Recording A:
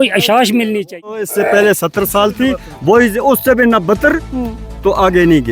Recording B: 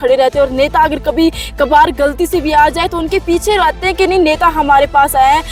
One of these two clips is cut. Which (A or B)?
A